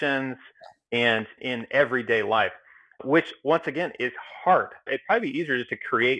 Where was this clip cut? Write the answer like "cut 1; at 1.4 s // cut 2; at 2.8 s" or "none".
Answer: none